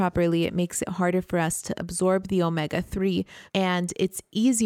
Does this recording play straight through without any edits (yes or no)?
no